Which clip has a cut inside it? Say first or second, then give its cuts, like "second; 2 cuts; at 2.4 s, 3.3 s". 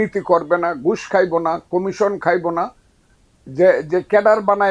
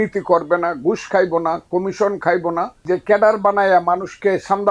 second; 1 cut; at 2.8 s